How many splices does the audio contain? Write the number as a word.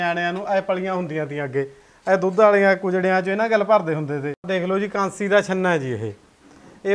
one